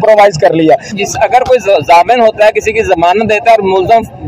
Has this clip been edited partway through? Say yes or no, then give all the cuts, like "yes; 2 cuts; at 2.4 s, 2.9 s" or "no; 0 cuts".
yes; 1 cut; at 0.9 s